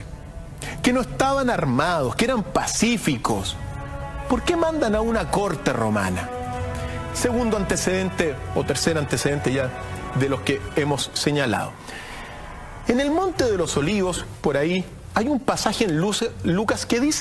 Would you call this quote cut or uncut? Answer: cut